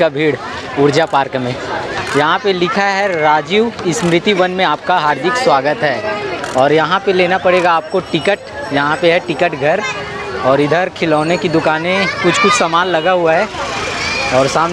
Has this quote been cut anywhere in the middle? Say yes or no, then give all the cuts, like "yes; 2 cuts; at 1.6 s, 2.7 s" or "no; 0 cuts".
no; 0 cuts